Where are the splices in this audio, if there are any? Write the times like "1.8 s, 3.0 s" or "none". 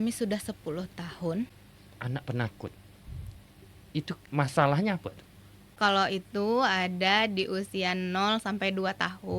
1.7 s, 4.2 s, 5.7 s